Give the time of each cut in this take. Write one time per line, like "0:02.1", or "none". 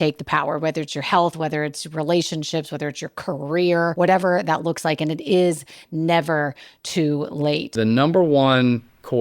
0:03.9
0:07.7